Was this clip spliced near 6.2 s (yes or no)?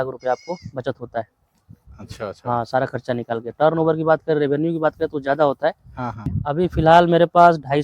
yes